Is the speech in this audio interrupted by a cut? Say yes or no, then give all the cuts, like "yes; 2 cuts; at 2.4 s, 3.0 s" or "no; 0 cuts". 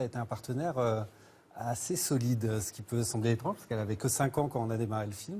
yes; 1 cut; at 3.1 s